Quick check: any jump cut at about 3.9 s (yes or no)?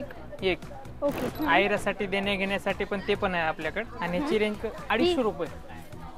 yes